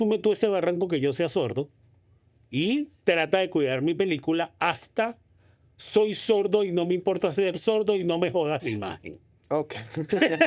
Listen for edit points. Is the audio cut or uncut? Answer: uncut